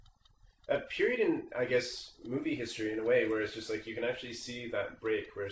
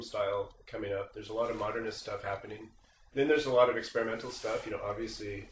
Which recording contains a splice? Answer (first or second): first